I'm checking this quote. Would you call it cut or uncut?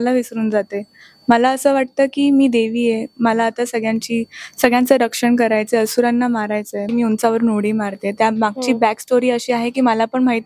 cut